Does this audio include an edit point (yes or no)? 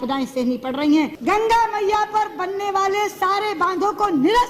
yes